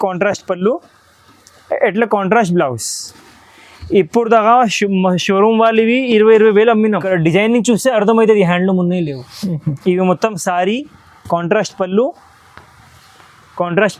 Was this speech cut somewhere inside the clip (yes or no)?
yes